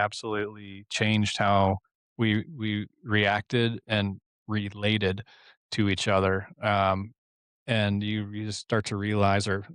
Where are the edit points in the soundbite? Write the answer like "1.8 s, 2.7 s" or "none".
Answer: none